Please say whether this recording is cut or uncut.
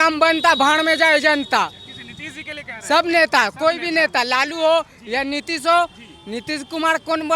uncut